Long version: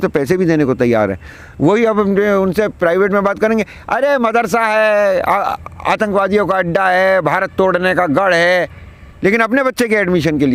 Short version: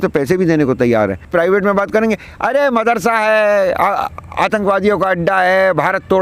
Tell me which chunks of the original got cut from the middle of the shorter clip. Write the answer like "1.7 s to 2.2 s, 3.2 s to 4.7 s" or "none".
1.3 s to 2.7 s